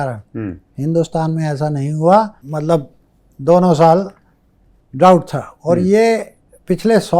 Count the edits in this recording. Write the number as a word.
one